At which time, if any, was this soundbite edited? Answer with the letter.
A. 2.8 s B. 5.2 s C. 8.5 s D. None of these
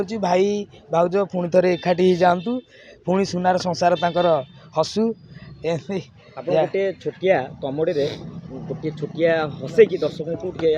D